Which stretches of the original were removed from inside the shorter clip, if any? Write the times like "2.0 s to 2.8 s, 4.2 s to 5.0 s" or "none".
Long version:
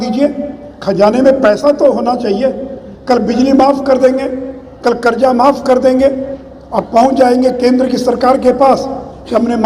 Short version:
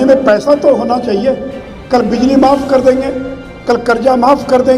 none